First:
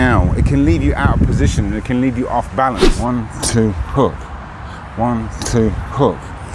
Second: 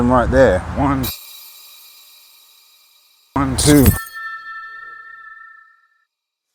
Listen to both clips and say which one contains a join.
first; 1 cut; at 2.9 s

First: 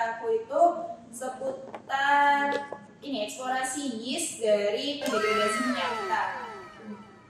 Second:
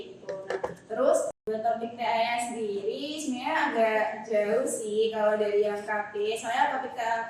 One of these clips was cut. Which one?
second; 1 cut; at 1.3 s

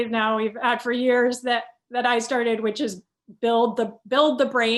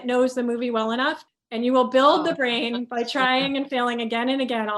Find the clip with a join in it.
second; 1 cut; at 1.2 s

